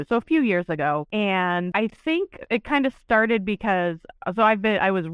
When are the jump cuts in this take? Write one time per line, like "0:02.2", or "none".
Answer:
0:01.1
0:01.7